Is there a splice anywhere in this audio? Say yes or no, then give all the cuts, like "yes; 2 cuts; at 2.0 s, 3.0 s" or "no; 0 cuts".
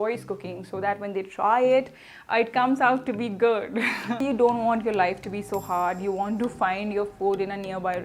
yes; 1 cut; at 4.2 s